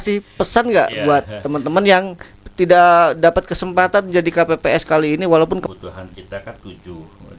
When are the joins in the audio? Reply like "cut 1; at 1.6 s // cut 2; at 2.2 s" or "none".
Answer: cut 1; at 5.6 s